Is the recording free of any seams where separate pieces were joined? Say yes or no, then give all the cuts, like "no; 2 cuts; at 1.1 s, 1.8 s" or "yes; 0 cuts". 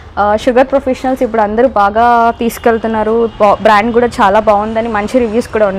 yes; 0 cuts